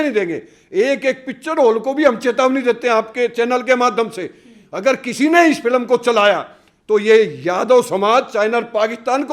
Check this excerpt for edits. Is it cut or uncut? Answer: uncut